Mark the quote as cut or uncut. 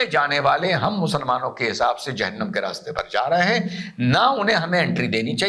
uncut